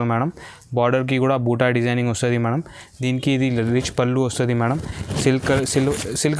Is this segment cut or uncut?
uncut